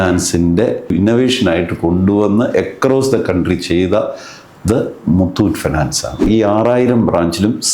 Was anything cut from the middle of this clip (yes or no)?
yes